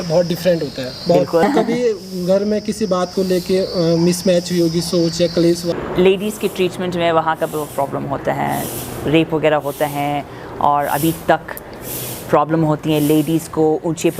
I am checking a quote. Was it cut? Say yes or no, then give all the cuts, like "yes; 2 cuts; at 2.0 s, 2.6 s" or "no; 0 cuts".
yes; 2 cuts; at 1.0 s, 5.7 s